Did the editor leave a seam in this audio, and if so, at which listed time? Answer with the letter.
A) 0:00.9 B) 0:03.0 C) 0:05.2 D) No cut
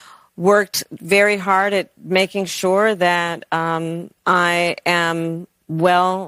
D